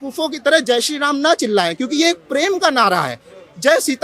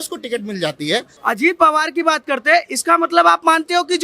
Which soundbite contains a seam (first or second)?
second